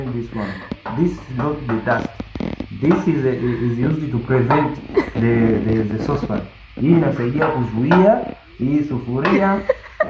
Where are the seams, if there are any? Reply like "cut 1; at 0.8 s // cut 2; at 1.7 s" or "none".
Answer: none